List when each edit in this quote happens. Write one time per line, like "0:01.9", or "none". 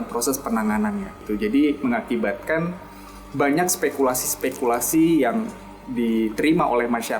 0:01.2

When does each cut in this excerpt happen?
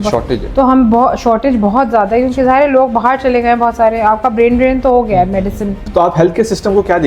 0:05.8

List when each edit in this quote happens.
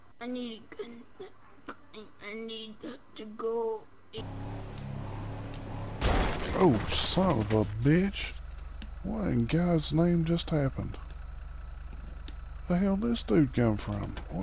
0:04.2

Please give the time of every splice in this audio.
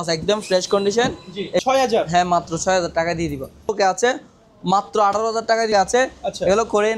0:01.6
0:03.7
0:05.7

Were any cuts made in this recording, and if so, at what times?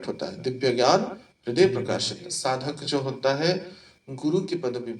0:02.3

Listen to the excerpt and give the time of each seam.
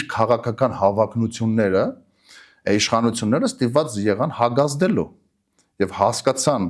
none

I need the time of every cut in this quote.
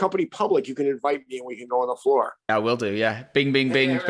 none

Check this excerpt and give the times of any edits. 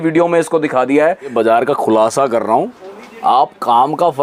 0:01.3

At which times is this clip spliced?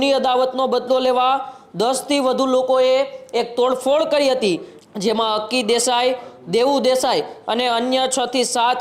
0:04.7

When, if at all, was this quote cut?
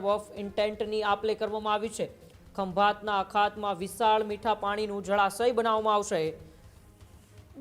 none

